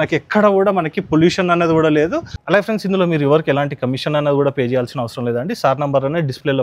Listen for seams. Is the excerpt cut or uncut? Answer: cut